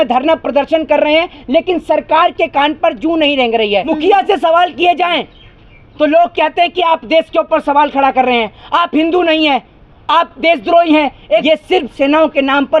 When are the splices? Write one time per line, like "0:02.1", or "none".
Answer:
0:03.9
0:11.4